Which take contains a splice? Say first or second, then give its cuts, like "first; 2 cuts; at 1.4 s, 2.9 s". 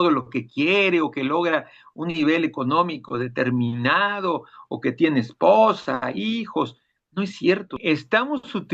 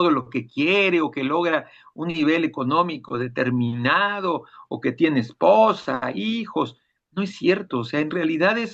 first; 1 cut; at 7.8 s